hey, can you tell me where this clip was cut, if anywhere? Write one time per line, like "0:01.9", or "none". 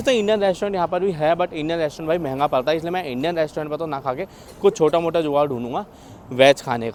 none